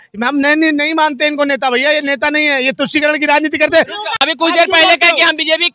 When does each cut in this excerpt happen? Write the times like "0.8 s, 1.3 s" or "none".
4.1 s